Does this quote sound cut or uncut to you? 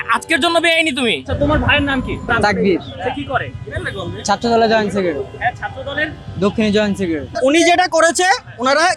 cut